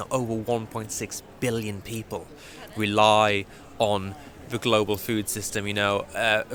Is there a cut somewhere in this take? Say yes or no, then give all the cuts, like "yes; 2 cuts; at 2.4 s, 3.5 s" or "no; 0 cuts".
no; 0 cuts